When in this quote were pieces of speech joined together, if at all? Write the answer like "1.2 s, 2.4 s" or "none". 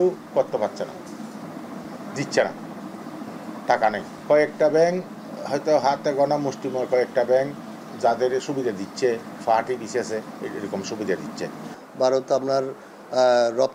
none